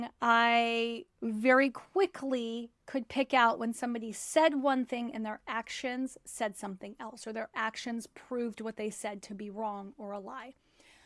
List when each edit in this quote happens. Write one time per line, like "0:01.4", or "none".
none